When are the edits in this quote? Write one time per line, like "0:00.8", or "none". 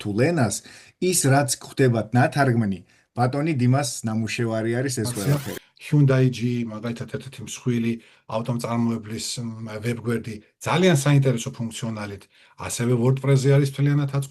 0:05.2